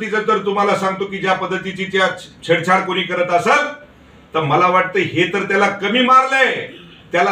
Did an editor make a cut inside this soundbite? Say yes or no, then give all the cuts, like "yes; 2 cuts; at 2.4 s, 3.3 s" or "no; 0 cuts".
no; 0 cuts